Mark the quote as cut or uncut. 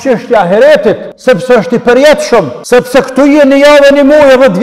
cut